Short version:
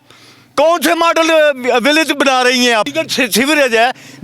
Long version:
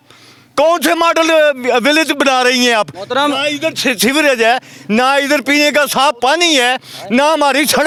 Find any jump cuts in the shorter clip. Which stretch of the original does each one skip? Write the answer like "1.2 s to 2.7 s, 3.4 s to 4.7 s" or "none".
2.9 s to 3.6 s